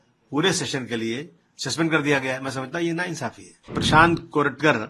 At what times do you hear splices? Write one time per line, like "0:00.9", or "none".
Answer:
0:03.8